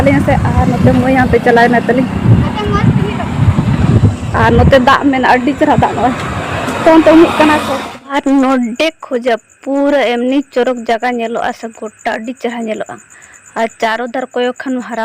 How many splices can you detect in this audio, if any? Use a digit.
1